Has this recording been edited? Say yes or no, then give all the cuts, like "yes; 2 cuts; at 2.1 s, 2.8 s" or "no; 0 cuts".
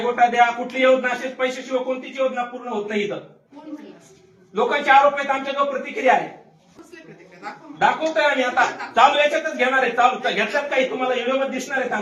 no; 0 cuts